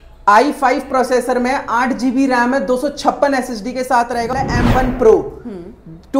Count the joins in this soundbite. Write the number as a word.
one